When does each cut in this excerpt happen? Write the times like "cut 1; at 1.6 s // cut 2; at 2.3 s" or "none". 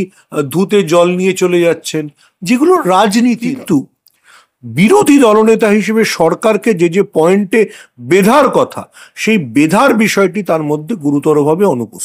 cut 1; at 3.5 s